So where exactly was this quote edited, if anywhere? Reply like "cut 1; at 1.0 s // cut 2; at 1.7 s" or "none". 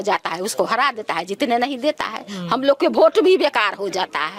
none